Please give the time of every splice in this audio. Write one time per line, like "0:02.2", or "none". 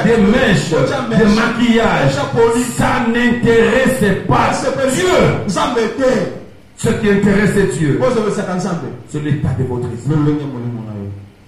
none